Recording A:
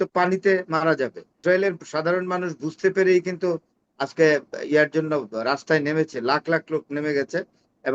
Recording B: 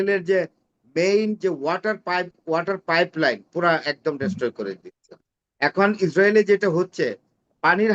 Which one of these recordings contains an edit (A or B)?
A